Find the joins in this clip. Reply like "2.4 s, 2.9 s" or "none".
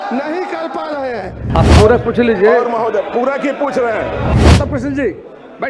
1.4 s, 4.3 s